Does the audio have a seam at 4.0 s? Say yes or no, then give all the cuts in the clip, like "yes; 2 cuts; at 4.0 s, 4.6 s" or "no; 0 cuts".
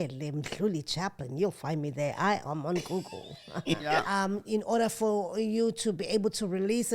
yes; 1 cut; at 4.0 s